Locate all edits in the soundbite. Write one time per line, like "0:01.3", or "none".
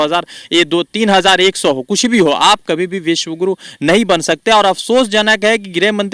none